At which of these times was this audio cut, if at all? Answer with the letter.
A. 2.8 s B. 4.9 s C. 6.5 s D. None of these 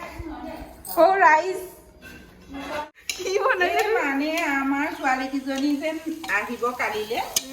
A